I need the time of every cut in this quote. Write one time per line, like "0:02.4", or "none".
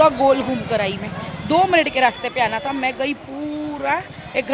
none

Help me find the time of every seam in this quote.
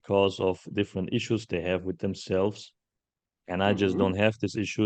none

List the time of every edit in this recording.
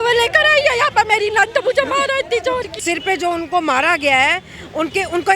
0:02.8

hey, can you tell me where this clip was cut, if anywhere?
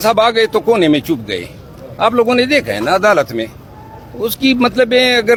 none

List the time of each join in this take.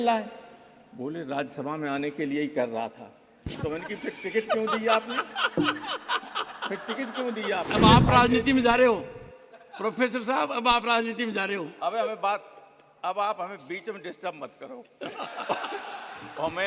0:07.7

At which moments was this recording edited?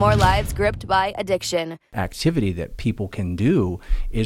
0:01.8

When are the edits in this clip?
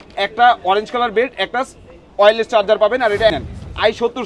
0:03.3

